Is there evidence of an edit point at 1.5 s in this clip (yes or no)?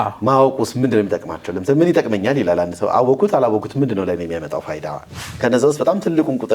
no